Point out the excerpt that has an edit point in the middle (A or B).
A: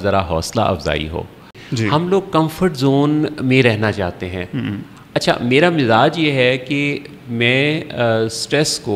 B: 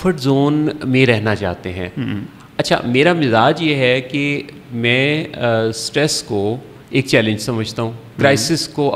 A